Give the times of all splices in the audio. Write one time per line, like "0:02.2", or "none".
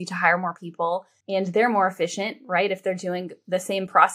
0:01.1